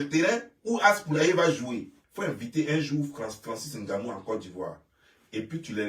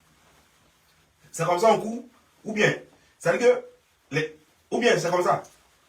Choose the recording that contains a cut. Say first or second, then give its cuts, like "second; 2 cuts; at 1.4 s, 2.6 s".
first; 1 cut; at 2.0 s